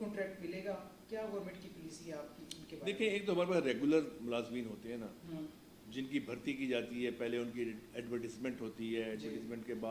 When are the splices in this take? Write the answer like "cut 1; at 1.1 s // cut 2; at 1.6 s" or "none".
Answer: none